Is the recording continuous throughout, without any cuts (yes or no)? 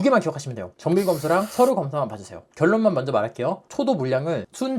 yes